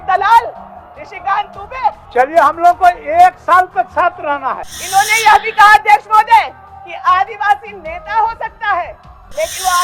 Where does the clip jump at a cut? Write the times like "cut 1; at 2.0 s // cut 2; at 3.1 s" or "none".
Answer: cut 1; at 4.7 s